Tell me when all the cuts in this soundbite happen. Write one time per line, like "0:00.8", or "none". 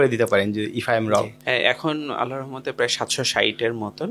none